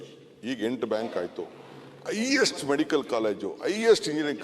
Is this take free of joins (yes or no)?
yes